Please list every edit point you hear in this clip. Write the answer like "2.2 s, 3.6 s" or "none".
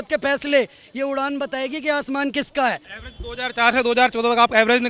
2.9 s